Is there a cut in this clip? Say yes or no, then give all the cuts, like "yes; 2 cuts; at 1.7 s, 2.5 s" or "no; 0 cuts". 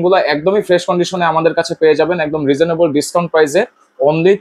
no; 0 cuts